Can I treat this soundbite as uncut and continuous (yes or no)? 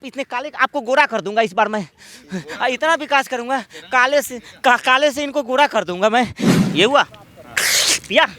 no